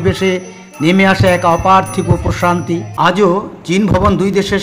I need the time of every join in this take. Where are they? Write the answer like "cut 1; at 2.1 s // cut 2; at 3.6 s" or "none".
cut 1; at 2.9 s